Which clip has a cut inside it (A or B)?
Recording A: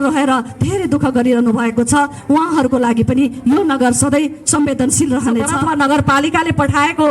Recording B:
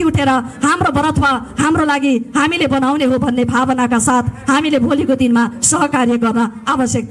A